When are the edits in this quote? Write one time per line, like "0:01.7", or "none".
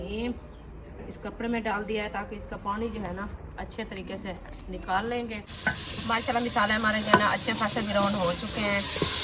0:05.5